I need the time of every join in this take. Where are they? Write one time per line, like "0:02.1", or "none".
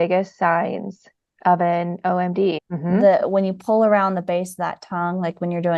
0:02.6